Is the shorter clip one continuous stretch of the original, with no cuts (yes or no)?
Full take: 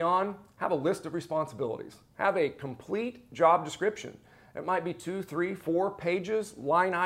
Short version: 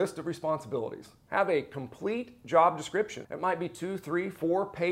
no